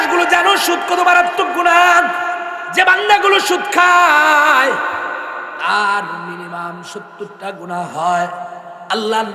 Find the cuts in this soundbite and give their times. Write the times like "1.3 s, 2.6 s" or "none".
2.6 s